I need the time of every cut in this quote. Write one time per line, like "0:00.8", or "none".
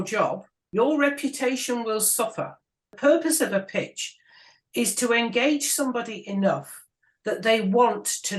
0:02.9